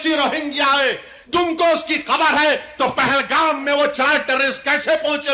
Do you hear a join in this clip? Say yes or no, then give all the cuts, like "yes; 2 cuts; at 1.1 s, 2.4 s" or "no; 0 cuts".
no; 0 cuts